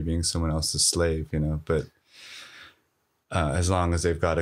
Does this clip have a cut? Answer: no; 0 cuts

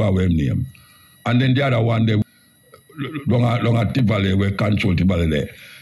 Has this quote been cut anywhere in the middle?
yes; 1 cut; at 2.2 s

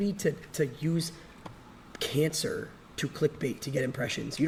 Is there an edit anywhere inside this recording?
no; 0 cuts

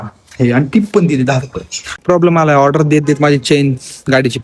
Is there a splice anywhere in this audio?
yes; 1 cut; at 2.0 s

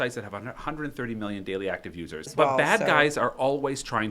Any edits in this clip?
yes; 1 cut; at 2.3 s

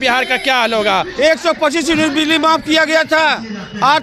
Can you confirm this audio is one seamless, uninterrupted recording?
no; 1 cut; at 1.1 s

